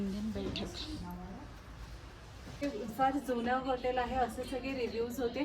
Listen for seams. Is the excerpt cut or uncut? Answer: cut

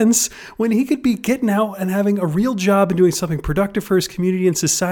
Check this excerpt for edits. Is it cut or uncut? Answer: uncut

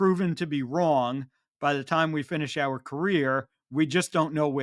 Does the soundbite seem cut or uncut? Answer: uncut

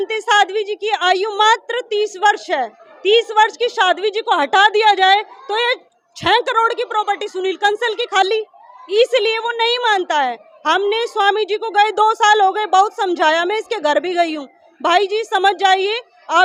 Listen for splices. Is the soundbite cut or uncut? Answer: uncut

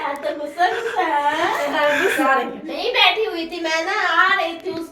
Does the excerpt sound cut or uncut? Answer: cut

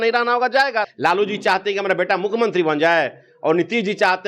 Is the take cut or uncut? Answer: cut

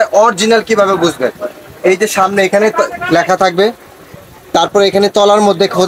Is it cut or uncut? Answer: uncut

